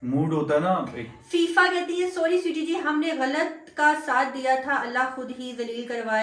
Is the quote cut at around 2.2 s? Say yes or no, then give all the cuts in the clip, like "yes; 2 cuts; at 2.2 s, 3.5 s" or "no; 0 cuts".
no; 0 cuts